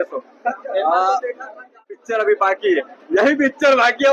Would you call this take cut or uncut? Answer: cut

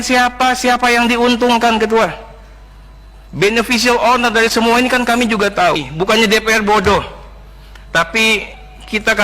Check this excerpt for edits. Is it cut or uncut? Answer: cut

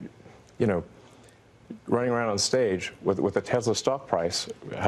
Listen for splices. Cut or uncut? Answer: uncut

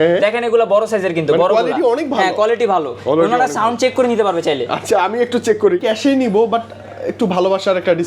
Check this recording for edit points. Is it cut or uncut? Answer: cut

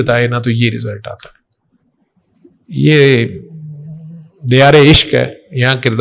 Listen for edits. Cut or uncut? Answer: uncut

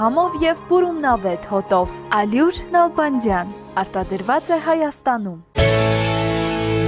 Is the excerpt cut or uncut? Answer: cut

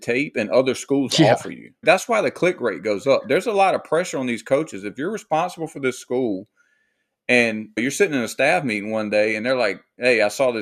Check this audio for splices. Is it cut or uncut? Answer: cut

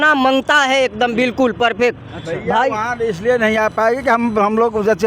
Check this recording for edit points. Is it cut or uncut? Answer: uncut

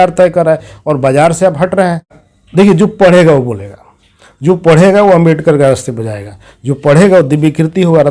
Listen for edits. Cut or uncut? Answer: cut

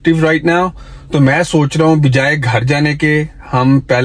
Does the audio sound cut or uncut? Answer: uncut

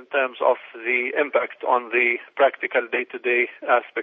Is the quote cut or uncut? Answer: uncut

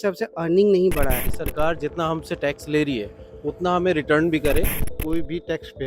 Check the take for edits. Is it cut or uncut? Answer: cut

